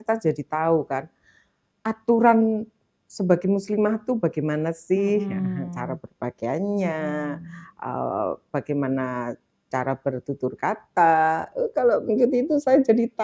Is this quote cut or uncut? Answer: uncut